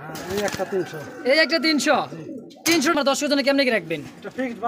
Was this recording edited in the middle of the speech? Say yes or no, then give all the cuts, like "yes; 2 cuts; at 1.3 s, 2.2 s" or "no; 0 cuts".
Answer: yes; 1 cut; at 2.9 s